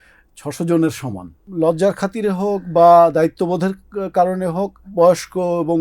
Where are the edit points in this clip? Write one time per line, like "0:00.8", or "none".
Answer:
0:01.4
0:04.8

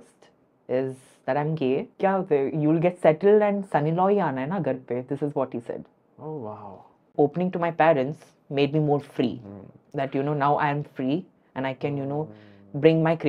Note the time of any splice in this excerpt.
0:01.9
0:07.1

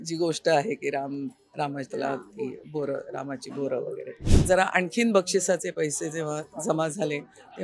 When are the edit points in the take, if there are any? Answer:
0:04.3

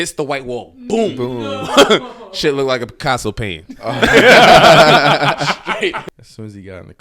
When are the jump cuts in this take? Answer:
0:06.0

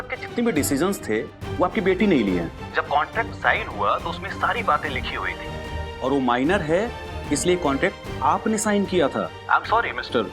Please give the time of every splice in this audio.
0:02.6
0:09.4

